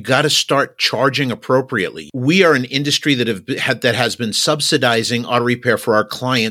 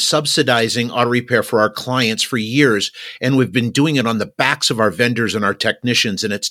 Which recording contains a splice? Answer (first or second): first